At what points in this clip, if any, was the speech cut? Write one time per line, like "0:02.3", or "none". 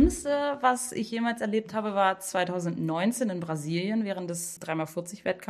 0:04.5